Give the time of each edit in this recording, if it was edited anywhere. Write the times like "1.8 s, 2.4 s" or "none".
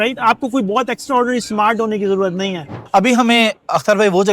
2.8 s